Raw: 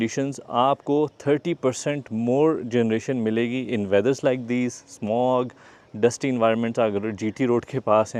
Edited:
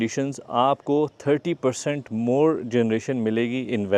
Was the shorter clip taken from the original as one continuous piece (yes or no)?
yes